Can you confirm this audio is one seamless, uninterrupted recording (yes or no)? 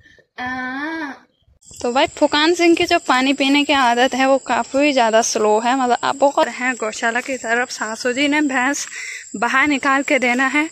no